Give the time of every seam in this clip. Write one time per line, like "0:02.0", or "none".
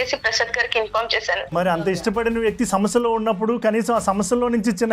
0:01.5